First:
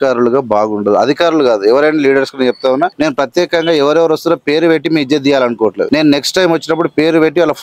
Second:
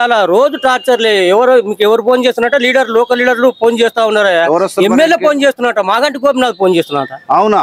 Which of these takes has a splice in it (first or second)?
first